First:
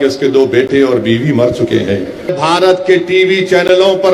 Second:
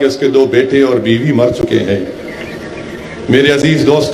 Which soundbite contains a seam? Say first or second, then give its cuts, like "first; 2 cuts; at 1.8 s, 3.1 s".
first; 1 cut; at 2.3 s